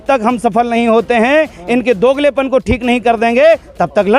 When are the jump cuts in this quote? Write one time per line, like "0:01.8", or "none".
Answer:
none

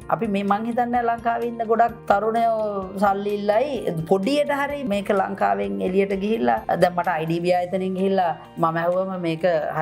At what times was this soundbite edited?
0:02.0
0:04.8
0:06.6

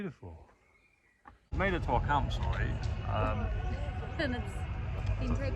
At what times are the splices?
0:01.5

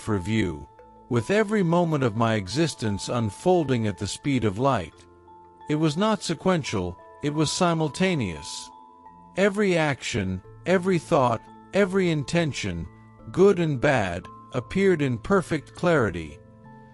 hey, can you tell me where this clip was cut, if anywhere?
none

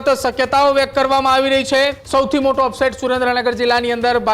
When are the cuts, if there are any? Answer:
0:02.0

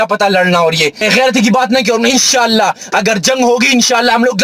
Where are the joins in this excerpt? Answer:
0:01.0

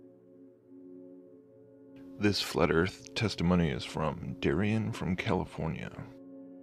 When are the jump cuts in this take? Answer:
none

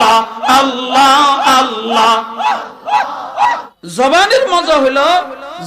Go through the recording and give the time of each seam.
0:03.7

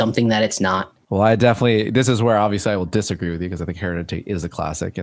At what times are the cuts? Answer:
0:01.0

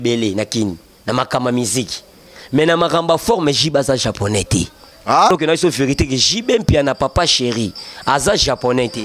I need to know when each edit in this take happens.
0:05.3

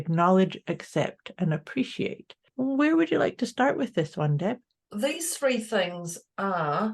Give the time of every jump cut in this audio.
0:02.5
0:04.8

